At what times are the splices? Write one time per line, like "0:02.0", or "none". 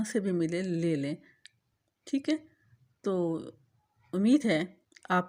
none